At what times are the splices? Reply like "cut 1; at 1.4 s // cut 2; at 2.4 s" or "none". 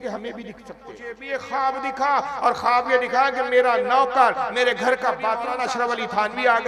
cut 1; at 1.1 s // cut 2; at 5.5 s